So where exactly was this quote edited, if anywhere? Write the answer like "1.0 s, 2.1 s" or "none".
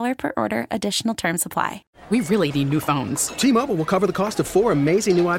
1.9 s

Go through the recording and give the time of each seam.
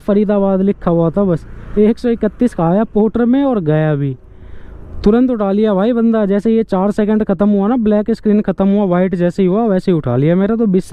none

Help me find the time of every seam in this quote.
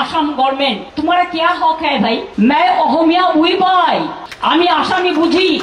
0.9 s, 2.3 s, 4.2 s

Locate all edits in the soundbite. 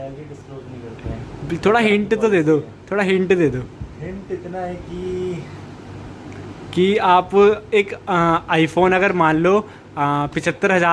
none

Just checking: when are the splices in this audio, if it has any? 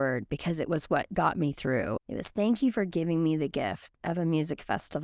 2.0 s

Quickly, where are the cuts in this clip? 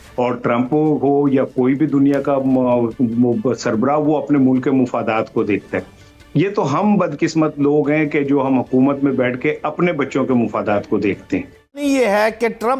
11.8 s

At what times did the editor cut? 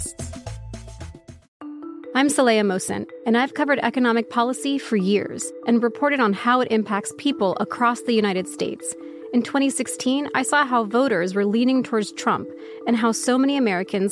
1.4 s

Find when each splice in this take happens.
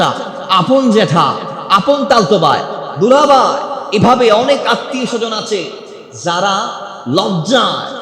none

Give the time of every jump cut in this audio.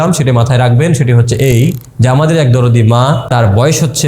none

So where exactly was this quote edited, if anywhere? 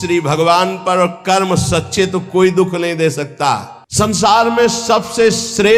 3.8 s

